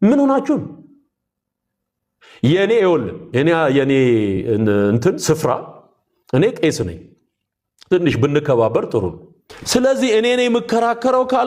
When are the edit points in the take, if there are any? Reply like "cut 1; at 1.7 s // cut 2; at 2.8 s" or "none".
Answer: none